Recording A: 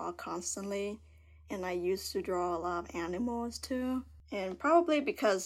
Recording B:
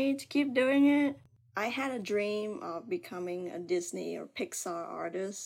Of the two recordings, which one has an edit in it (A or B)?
B